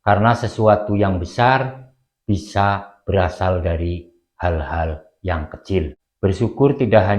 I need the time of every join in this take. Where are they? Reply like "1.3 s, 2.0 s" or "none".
6.0 s

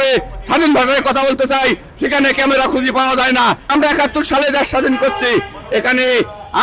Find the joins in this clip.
3.7 s

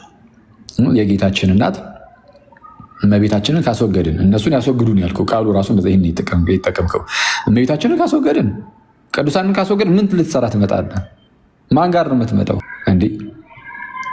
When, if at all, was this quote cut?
12.7 s

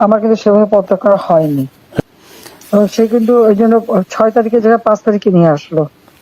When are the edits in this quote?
2.0 s

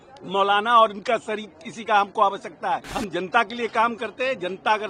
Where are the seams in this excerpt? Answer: 2.9 s

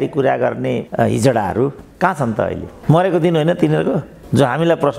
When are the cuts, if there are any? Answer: none

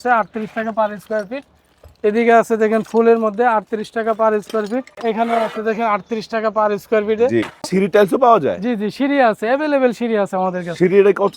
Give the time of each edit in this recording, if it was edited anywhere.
5.0 s, 7.7 s

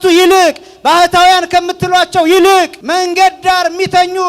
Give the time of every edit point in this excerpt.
2.8 s

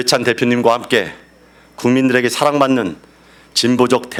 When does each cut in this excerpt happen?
none

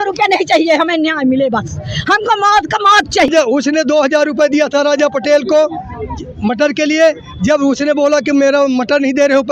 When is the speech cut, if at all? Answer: 3.3 s

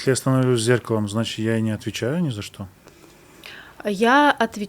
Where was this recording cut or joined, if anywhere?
none

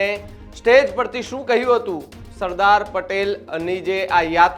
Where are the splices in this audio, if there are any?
none

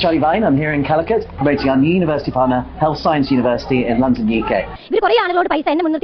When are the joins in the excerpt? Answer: 4.8 s

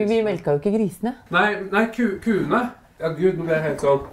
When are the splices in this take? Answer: 1.2 s, 2.8 s

